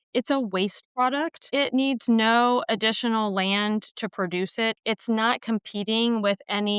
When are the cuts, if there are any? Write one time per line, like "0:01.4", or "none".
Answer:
0:04.8